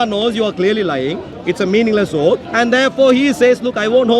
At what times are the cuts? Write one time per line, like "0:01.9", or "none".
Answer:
0:01.3
0:02.5